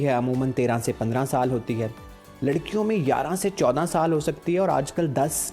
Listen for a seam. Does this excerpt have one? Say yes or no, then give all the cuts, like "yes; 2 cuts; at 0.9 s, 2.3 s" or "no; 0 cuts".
no; 0 cuts